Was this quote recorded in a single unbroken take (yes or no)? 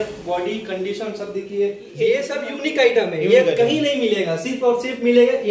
no